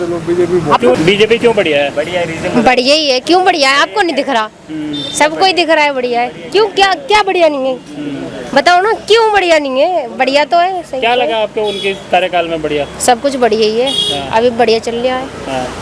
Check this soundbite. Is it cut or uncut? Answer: uncut